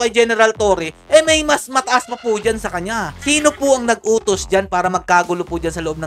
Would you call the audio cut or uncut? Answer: cut